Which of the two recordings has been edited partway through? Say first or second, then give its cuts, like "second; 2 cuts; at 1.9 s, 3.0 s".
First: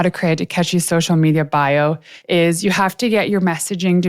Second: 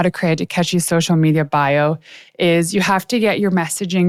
first; 1 cut; at 2.1 s